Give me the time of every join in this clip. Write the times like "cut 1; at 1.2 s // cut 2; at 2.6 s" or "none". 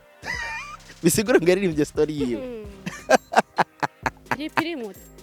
none